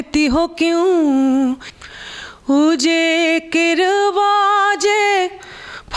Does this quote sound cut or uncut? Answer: cut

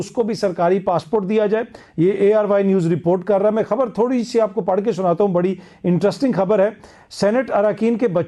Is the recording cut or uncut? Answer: uncut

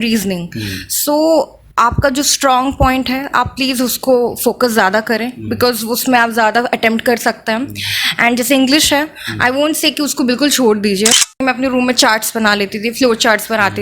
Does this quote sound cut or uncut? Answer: cut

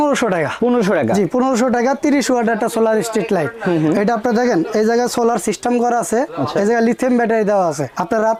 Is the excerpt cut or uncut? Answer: uncut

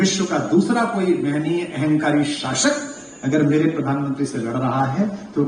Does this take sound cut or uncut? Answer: uncut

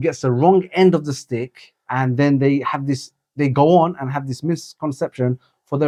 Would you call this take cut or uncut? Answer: uncut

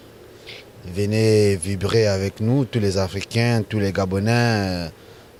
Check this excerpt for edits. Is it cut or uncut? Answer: uncut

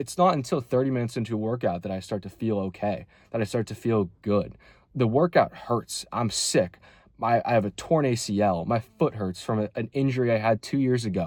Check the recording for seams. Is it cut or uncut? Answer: uncut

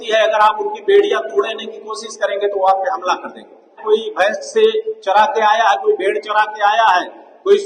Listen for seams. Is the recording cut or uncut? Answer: cut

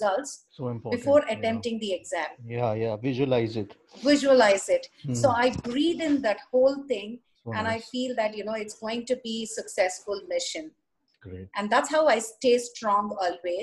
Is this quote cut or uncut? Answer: uncut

